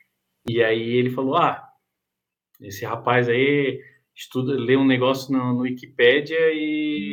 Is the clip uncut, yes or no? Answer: yes